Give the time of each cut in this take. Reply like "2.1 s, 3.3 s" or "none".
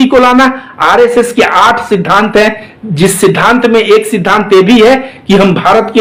none